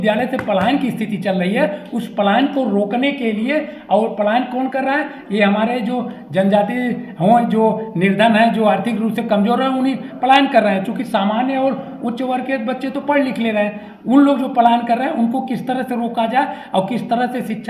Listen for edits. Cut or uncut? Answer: uncut